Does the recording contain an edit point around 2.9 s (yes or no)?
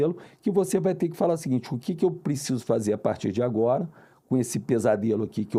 no